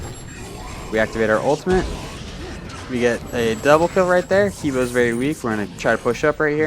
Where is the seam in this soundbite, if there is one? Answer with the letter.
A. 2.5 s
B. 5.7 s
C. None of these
B